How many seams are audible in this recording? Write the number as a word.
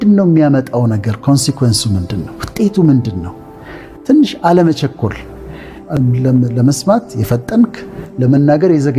one